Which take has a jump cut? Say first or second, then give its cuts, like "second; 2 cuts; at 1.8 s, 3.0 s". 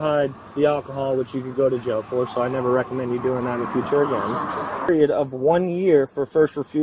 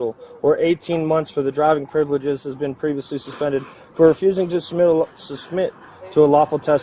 first; 1 cut; at 4.9 s